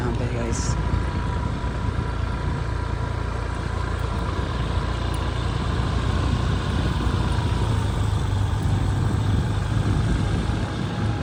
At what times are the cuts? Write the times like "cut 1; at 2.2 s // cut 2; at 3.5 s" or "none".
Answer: none